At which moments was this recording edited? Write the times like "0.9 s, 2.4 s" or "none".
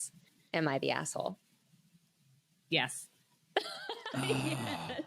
none

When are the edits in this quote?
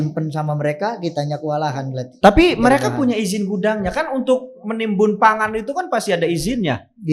none

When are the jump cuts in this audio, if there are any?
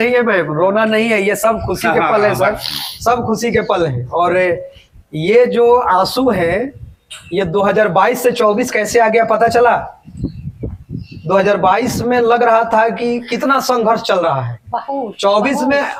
none

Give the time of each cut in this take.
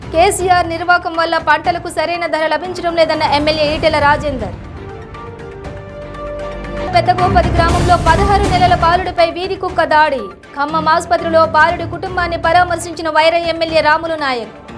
none

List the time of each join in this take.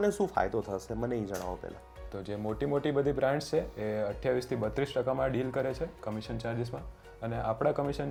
none

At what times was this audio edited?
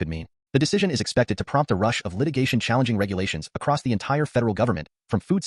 none

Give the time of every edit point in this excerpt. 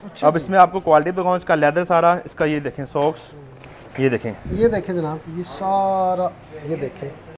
none

